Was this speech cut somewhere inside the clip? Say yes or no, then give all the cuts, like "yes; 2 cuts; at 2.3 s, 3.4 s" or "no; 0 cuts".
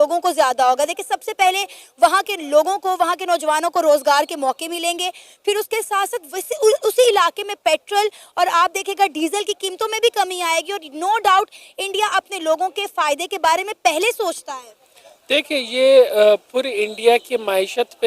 no; 0 cuts